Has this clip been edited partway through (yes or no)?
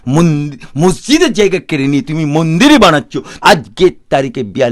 yes